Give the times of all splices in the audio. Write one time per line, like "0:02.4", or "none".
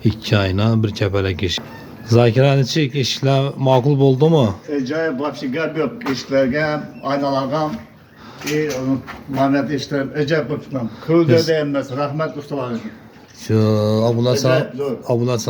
0:01.5